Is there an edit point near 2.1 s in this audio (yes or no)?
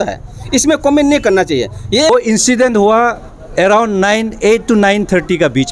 yes